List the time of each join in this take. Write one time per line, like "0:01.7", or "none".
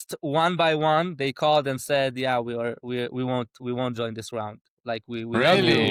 none

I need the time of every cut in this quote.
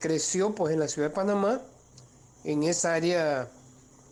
none

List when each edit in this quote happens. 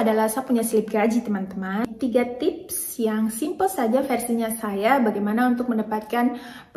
0:01.8

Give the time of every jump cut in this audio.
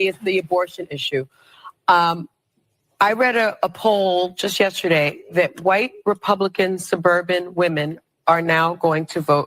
0:01.7

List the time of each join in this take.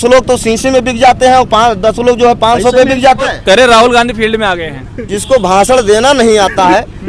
0:03.2

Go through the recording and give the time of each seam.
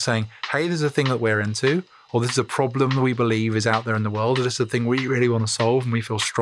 none

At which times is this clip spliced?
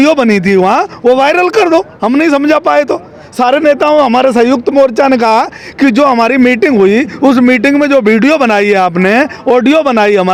none

